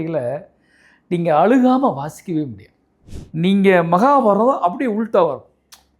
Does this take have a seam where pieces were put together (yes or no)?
yes